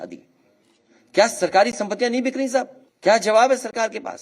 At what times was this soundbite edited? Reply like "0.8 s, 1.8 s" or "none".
2.8 s